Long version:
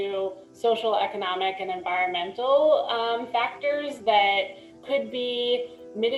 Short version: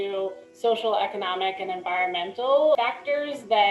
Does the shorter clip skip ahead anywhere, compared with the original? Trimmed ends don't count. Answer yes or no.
yes